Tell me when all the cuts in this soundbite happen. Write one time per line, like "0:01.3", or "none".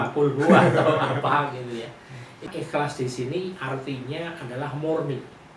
0:02.5